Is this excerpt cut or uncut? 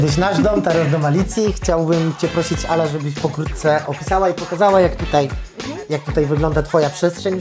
uncut